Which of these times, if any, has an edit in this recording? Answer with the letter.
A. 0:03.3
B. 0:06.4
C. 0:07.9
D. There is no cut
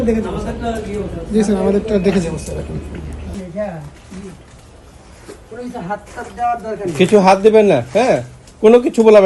A